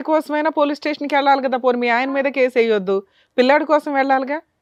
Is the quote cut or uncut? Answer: uncut